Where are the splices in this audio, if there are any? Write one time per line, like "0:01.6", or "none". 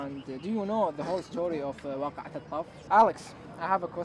0:02.8